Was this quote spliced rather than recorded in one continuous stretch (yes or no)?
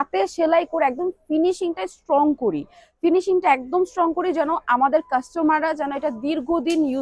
no